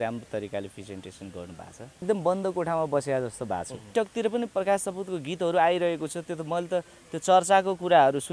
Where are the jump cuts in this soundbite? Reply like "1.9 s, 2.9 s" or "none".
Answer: 2.0 s, 3.9 s